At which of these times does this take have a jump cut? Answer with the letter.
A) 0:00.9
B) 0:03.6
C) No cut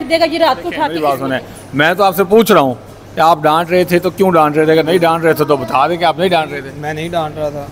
A